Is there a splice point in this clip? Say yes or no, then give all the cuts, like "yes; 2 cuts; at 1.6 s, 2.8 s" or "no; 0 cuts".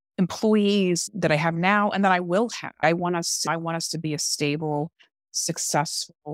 yes; 2 cuts; at 1.1 s, 3.1 s